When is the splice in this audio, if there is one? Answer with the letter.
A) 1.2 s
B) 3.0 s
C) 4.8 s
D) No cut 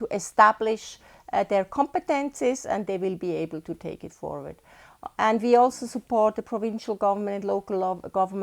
D